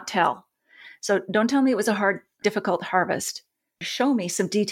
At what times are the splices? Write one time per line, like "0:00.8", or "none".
none